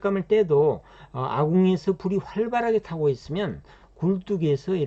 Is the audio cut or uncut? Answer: uncut